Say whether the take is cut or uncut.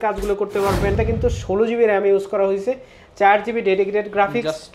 cut